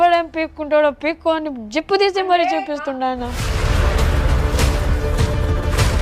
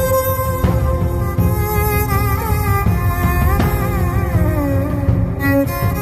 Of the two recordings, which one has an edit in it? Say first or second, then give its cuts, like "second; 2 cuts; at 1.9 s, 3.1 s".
first; 1 cut; at 3.4 s